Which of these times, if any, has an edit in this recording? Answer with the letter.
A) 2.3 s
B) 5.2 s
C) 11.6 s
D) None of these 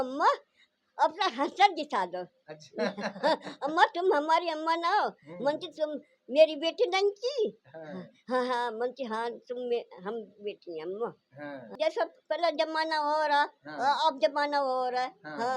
C